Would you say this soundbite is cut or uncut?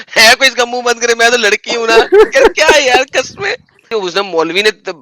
cut